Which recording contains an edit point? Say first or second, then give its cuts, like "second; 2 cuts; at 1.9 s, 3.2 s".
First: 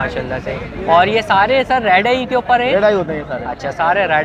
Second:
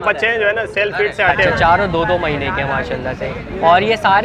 second; 1 cut; at 1.5 s